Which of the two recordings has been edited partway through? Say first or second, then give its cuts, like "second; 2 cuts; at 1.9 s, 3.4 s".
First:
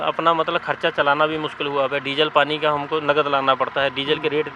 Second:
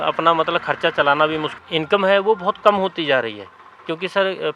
second; 1 cut; at 1.5 s